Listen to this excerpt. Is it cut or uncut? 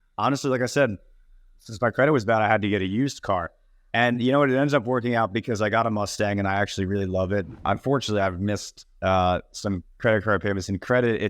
cut